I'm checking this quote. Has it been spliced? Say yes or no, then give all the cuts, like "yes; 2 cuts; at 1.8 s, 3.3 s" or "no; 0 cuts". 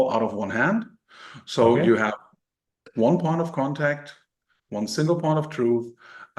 no; 0 cuts